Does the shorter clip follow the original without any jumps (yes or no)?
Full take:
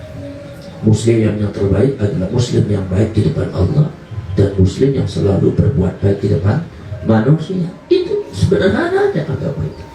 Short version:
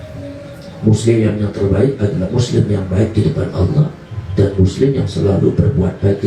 yes